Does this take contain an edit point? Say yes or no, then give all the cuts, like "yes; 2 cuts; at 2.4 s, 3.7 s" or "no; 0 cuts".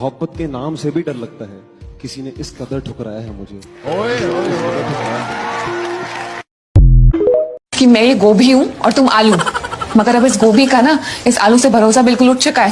yes; 1 cut; at 7.6 s